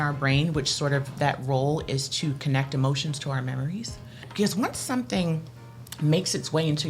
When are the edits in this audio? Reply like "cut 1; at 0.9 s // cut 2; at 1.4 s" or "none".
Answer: cut 1; at 4.3 s